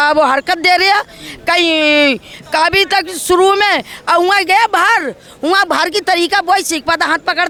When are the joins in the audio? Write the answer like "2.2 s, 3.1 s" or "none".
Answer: none